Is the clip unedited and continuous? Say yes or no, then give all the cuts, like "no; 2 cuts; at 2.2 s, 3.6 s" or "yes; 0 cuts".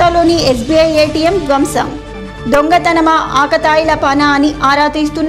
yes; 0 cuts